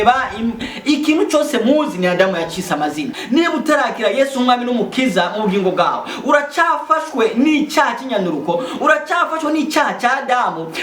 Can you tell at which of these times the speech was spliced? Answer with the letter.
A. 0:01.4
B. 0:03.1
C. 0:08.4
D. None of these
B